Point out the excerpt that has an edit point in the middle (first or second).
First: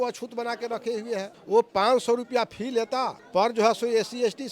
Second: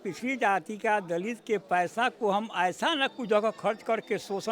first